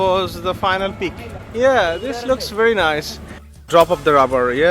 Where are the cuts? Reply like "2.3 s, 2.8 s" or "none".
3.6 s